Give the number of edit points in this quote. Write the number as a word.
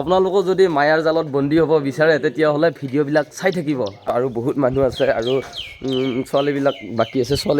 one